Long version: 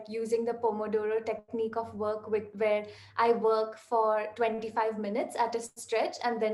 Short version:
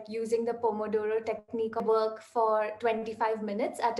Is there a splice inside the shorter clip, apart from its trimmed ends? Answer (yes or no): yes